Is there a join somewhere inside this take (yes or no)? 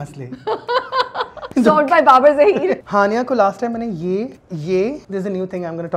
yes